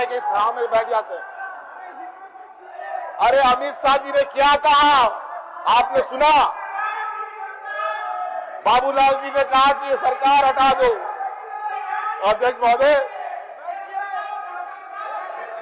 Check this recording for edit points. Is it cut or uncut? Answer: uncut